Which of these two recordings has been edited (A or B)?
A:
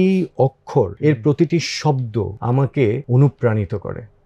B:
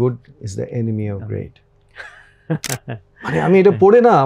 A